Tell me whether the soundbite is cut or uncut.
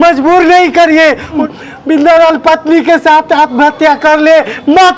cut